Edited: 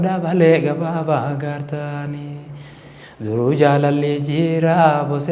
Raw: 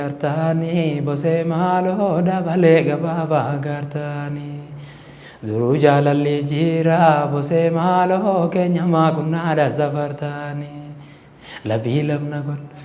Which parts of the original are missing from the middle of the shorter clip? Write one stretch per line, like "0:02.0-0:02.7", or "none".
none